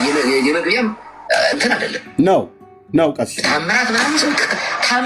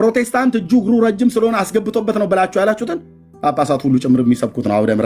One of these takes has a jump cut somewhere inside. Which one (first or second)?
first